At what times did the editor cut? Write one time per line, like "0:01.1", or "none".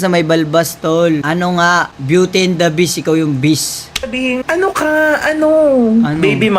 0:01.2
0:04.4